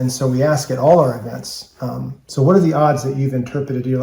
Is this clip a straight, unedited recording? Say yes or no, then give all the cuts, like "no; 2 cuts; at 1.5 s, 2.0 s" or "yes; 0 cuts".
yes; 0 cuts